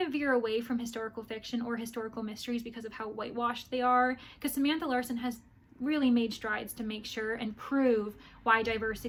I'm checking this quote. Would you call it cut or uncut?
uncut